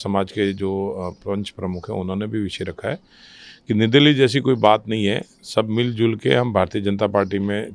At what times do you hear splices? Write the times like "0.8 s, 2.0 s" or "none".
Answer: none